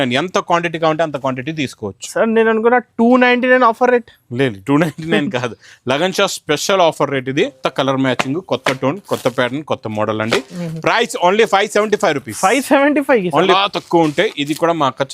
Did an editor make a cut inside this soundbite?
yes; 2 cuts; at 7.6 s, 13.5 s

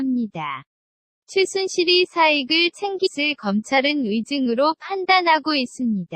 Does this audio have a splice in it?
no; 0 cuts

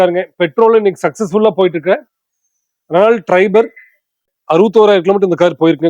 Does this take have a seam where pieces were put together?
yes; 1 cut; at 4.4 s

